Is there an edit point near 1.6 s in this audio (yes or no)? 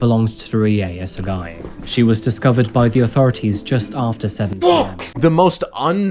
no